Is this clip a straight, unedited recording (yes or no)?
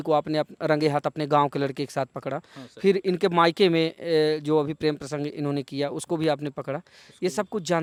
yes